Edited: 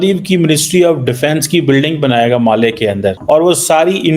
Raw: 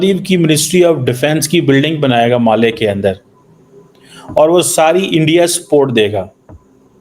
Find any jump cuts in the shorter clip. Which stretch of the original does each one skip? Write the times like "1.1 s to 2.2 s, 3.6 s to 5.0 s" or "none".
3.2 s to 4.3 s